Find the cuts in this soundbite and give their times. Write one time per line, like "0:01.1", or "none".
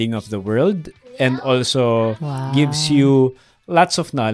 none